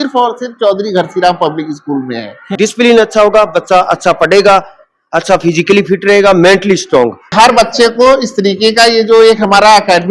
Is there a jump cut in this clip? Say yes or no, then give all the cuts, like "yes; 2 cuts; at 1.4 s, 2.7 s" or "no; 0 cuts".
yes; 2 cuts; at 2.4 s, 7.3 s